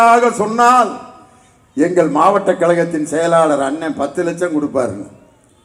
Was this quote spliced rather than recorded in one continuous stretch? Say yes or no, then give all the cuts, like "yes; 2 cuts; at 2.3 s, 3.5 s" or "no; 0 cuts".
no; 0 cuts